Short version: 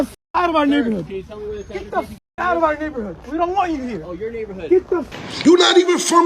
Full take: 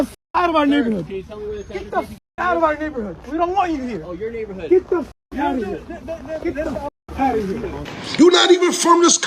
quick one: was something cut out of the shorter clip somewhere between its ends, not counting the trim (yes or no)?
yes